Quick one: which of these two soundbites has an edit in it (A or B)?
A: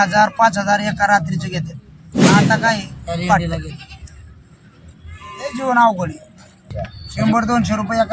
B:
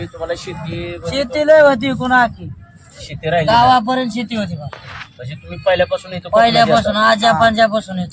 A